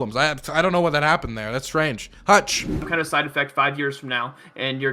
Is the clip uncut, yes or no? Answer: no